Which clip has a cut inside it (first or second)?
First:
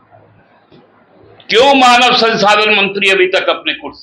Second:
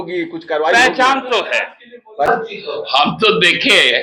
second